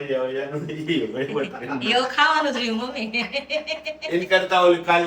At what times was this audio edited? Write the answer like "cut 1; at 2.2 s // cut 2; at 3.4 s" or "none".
none

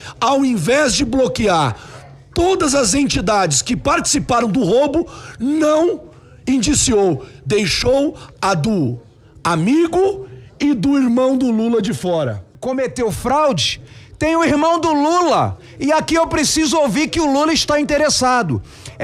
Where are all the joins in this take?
cut 1; at 12.5 s

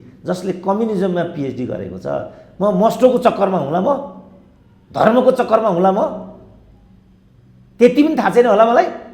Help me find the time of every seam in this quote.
none

